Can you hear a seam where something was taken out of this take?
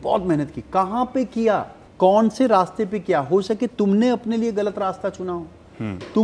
yes; 1 cut; at 1.8 s

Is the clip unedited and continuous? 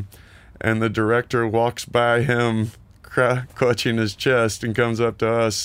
yes; 0 cuts

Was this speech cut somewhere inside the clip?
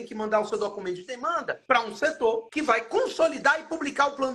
yes; 2 cuts; at 1.5 s, 2.5 s

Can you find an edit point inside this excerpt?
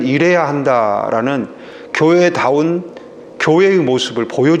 no; 0 cuts

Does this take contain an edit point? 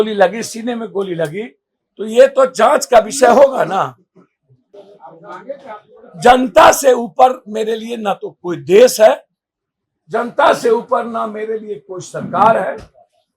yes; 1 cut; at 4.7 s

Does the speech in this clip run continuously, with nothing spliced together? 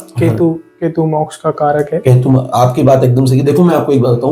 yes; 0 cuts

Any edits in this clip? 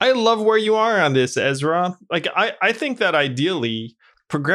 no; 0 cuts

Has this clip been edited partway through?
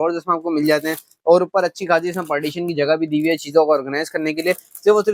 no; 0 cuts

